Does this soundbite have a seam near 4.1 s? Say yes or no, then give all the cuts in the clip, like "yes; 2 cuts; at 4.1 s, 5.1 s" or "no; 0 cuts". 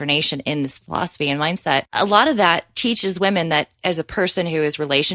no; 1 cut; at 1.9 s